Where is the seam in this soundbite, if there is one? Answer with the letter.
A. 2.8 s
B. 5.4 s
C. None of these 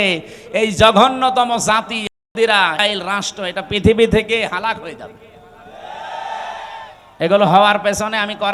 A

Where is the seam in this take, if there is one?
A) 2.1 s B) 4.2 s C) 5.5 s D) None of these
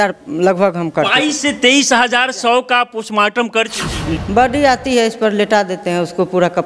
B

